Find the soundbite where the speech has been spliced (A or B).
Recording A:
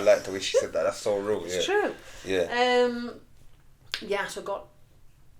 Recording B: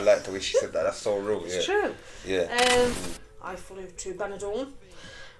B